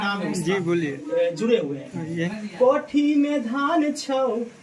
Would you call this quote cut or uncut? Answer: cut